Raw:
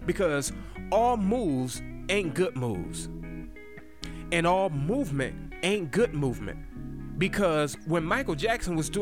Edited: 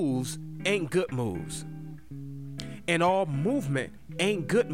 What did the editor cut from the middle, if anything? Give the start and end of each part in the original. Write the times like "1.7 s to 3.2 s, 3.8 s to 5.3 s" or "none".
none